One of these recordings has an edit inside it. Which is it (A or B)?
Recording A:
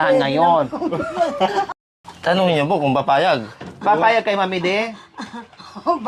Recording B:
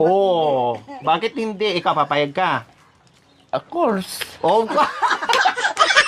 A